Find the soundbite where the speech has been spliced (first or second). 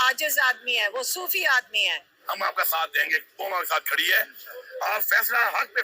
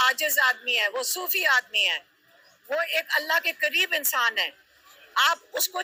first